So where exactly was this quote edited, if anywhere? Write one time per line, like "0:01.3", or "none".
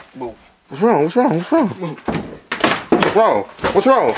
none